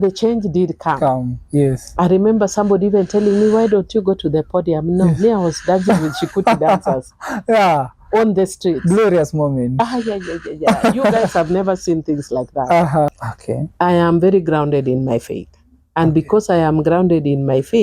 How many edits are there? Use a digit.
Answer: 1